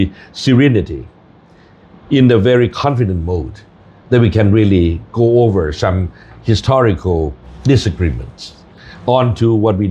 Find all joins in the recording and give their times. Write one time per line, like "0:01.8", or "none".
0:07.5